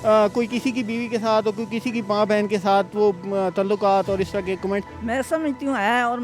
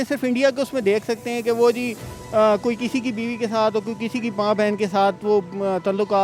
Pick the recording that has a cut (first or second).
first